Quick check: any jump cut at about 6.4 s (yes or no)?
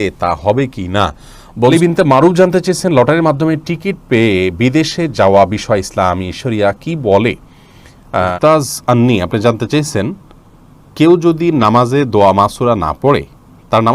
no